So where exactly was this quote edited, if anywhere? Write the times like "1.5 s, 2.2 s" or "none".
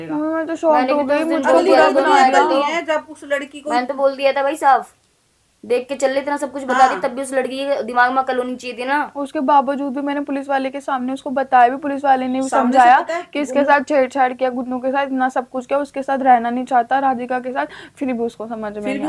none